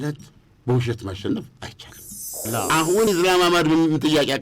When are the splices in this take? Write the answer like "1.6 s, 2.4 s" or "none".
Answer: 2.5 s